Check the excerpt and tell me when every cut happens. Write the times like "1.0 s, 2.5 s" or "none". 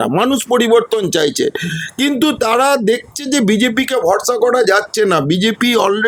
none